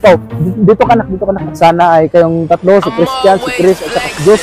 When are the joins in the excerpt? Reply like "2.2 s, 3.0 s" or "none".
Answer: 1.5 s